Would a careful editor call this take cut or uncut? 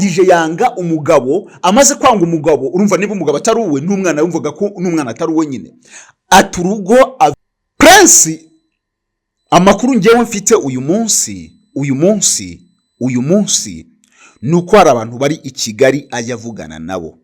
cut